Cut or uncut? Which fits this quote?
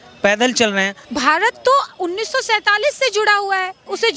cut